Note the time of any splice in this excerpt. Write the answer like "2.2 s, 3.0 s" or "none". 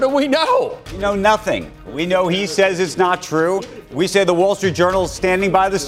1.0 s